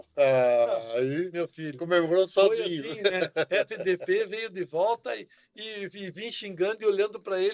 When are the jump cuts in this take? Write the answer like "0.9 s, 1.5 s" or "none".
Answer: none

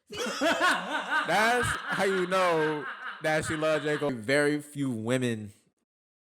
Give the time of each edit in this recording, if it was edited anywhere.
4.1 s

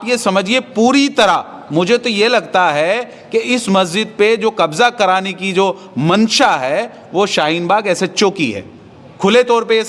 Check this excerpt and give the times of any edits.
none

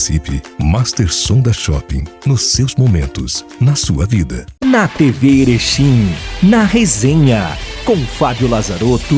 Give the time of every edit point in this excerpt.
4.4 s

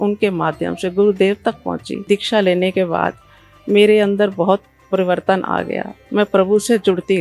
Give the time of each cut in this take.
2.0 s

